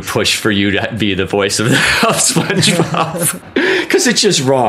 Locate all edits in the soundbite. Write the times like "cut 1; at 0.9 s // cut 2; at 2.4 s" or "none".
cut 1; at 3.4 s